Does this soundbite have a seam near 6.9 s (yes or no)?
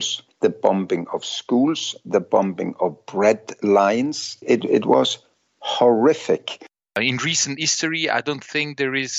yes